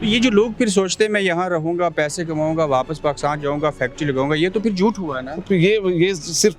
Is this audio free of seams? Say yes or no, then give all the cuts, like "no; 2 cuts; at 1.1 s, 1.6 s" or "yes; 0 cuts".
yes; 0 cuts